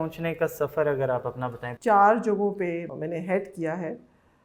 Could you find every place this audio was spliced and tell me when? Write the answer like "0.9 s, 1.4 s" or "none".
1.6 s, 2.9 s